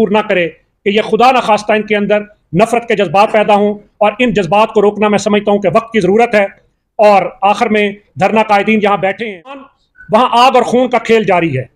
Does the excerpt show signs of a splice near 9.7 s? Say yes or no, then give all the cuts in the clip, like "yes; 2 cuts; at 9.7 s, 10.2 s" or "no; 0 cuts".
yes; 1 cut; at 9.7 s